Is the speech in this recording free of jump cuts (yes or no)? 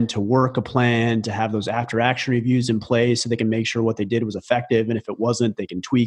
yes